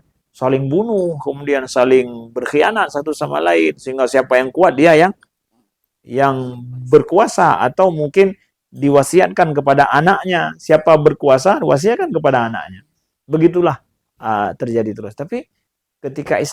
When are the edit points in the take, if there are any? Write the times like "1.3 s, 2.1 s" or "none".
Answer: none